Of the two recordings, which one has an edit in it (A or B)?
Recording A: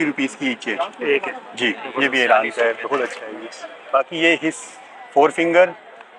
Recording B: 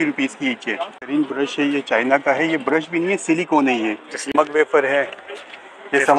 B